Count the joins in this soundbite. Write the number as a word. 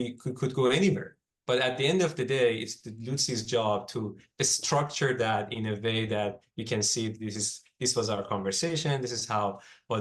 zero